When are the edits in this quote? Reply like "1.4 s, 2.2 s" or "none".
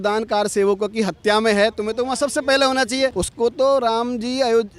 3.2 s